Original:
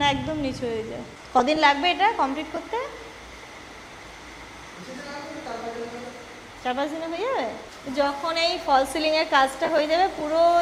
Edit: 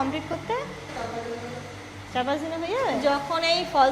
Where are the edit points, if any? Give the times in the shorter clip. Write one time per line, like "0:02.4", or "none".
0:00.9
0:03.0